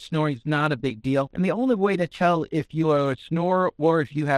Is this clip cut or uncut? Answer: cut